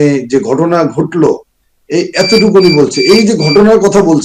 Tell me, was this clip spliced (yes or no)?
no